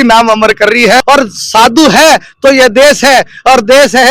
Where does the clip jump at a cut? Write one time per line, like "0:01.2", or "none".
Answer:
0:01.0